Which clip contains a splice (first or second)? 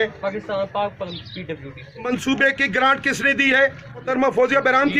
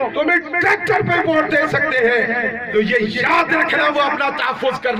first